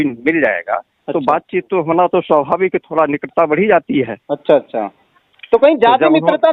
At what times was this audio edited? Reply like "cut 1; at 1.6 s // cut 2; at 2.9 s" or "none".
none